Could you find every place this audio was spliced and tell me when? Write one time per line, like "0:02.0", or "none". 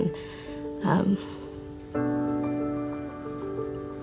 none